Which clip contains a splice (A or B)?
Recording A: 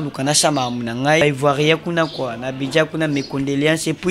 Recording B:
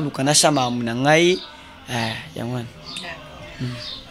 A